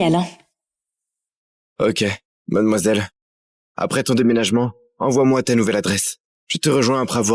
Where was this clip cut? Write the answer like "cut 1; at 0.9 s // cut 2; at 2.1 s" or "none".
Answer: cut 1; at 2.3 s